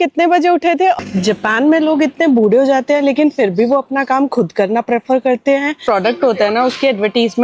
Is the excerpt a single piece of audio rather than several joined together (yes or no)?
no